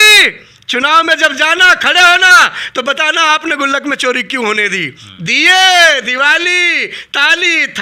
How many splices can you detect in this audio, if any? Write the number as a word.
zero